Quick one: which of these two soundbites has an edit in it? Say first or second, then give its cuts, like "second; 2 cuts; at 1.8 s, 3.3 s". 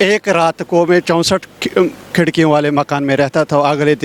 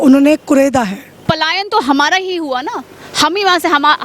second; 1 cut; at 1.1 s